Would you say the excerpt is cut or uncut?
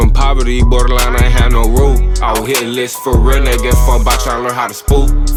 uncut